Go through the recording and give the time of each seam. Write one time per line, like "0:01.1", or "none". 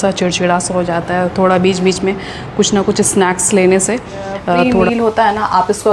0:04.8